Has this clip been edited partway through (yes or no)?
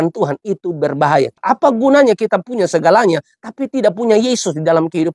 yes